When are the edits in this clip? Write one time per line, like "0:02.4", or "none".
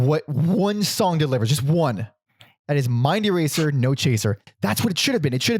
0:04.4